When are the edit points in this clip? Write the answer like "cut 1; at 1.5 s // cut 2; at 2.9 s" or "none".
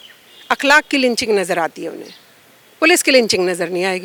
none